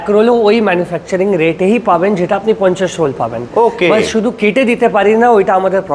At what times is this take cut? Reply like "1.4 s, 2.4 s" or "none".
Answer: none